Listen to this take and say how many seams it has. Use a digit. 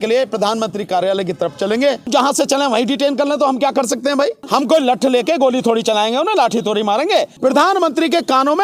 3